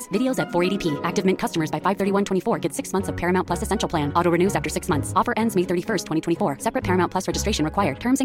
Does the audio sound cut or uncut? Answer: uncut